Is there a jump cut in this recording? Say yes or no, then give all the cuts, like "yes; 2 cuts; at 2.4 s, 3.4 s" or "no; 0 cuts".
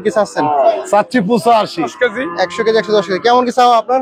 yes; 1 cut; at 1.9 s